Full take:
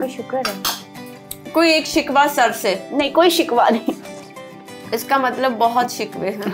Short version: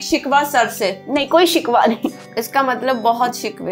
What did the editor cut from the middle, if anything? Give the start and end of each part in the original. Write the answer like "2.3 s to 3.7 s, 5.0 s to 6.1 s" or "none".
4.1 s to 4.9 s